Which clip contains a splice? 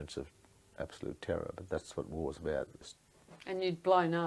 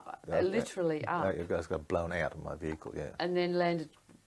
first; 1 cut; at 2.8 s

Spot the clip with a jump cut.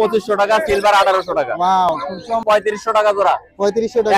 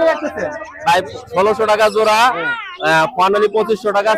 first; 1 cut; at 2.4 s

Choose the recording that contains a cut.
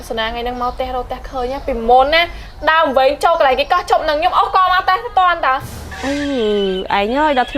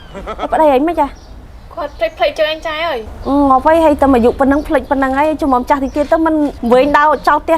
second; 2 cuts; at 3.1 s, 6.6 s

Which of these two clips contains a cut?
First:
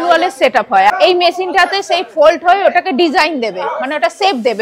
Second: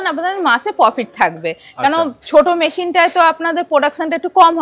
first; 1 cut; at 0.9 s

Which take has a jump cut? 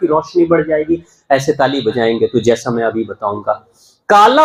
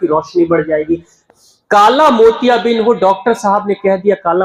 second; 1 cut; at 1.2 s

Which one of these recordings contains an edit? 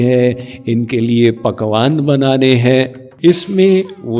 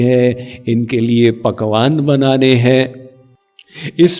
first; 1 cut; at 3.0 s

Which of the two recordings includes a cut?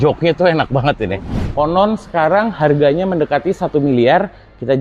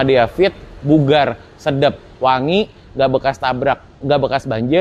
first; 1 cut; at 1.4 s

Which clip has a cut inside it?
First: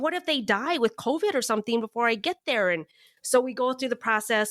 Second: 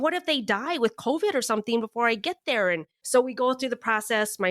second; 1 cut; at 2.9 s

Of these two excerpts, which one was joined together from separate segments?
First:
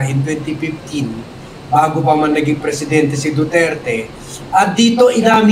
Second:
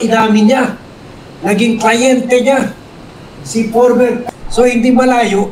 second; 1 cut; at 4.2 s

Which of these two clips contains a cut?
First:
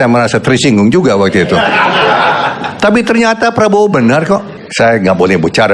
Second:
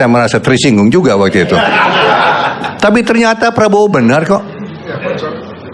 first; 1 cut; at 4.6 s

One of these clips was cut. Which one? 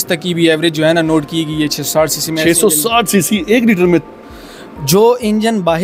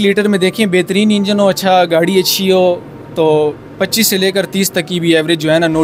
first; 1 cut; at 4.2 s

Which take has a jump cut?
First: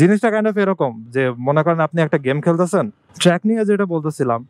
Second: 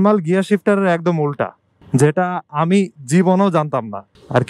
first; 1 cut; at 3.0 s

